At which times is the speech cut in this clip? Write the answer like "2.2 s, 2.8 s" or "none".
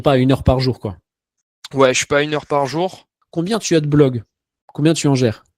3.2 s